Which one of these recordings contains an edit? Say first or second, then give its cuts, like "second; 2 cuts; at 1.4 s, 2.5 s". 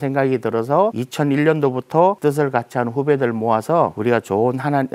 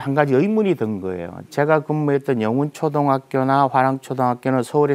first; 3 cuts; at 1.0 s, 2.2 s, 4.0 s